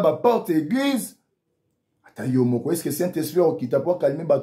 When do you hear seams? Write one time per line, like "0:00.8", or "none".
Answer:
none

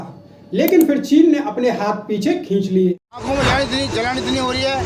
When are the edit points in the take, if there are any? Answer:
0:03.1

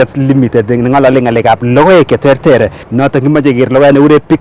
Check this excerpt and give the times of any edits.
0:02.8

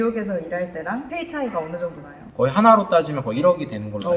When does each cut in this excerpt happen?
0:02.3

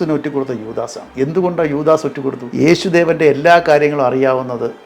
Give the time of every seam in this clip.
0:01.0
0:02.4

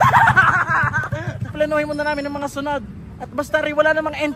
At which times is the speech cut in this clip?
0:01.5

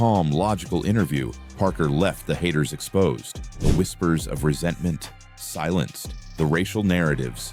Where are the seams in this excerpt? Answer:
none

